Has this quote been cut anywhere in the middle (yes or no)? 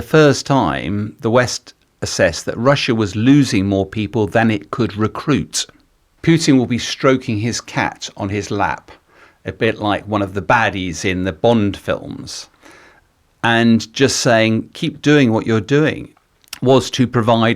yes